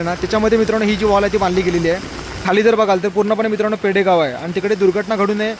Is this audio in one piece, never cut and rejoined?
no; 1 cut; at 2.4 s

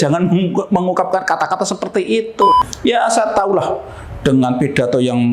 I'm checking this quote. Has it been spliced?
yes; 1 cut; at 2.5 s

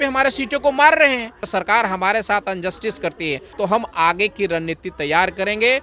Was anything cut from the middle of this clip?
yes; 2 cuts; at 1.5 s, 3.4 s

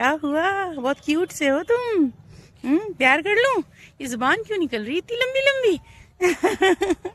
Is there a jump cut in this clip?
no; 0 cuts

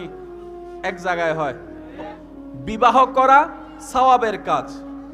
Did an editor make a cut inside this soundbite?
yes; 1 cut; at 2.2 s

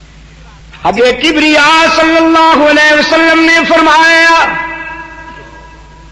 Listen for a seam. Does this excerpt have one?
yes; 1 cut; at 1.0 s

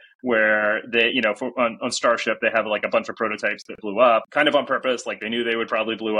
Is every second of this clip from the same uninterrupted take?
no; 1 cut; at 4.2 s

